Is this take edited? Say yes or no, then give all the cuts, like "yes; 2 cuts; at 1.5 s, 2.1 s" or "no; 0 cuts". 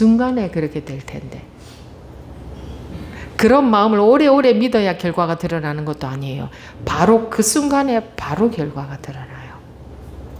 no; 0 cuts